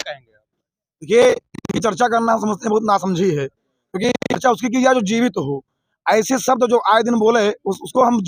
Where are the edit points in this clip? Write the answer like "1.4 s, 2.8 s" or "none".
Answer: none